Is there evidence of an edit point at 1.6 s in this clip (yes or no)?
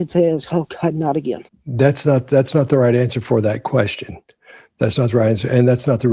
yes